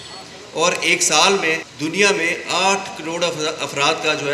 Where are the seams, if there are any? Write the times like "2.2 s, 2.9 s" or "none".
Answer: 1.7 s